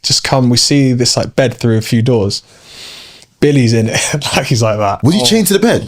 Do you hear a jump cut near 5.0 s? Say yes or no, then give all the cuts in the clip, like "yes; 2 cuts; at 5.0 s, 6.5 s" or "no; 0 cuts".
yes; 1 cut; at 5.0 s